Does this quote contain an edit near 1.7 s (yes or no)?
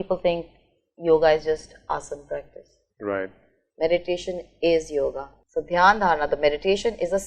no